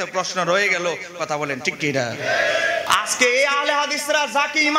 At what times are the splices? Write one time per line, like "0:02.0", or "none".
0:02.8